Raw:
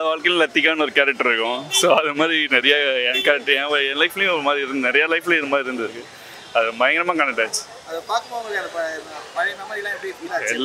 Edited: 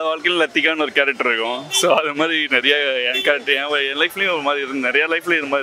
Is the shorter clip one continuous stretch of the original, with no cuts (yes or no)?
yes